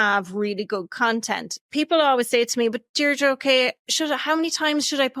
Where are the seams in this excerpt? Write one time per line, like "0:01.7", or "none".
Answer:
0:01.7

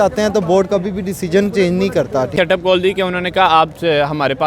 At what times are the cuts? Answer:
0:02.3

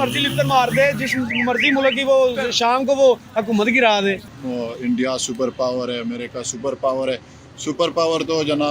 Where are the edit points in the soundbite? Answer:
0:04.3

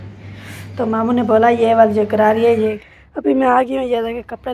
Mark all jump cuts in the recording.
0:02.8

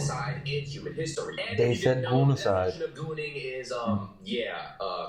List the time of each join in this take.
none

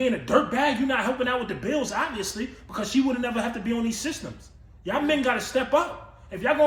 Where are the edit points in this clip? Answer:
none

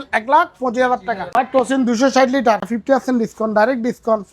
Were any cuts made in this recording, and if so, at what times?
0:01.2
0:02.7

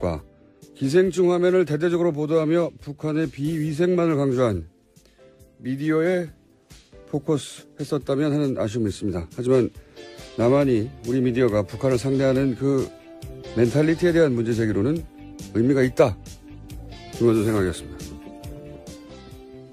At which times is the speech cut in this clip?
none

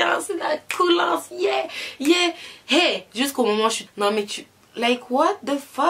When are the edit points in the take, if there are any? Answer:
0:03.8

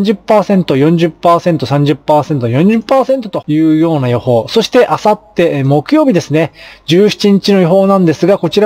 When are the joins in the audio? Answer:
0:03.3

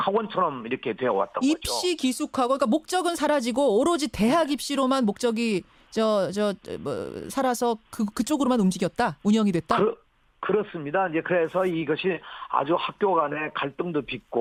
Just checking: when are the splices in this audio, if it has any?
none

